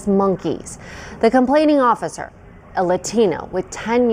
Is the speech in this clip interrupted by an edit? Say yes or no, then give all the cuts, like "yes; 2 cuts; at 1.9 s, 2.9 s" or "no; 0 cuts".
no; 0 cuts